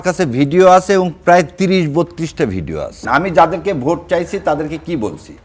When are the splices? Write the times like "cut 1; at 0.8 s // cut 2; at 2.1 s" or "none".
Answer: cut 1; at 3.0 s